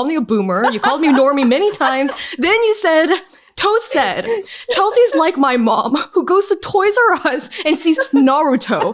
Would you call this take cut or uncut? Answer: uncut